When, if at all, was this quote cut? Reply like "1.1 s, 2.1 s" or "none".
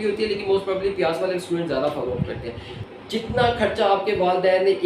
2.7 s